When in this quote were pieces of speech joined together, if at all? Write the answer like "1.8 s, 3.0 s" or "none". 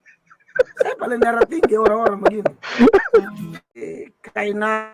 3.7 s